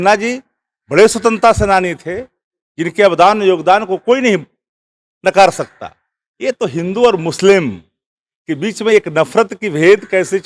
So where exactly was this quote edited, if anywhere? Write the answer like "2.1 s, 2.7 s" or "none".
none